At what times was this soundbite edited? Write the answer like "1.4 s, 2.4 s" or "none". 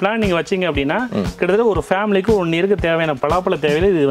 3.2 s